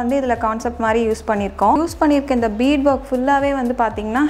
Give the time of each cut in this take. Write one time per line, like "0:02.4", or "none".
0:01.8